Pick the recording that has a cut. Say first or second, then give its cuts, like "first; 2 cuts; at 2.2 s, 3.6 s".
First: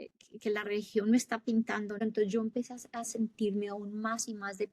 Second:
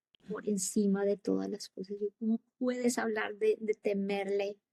first; 1 cut; at 2.0 s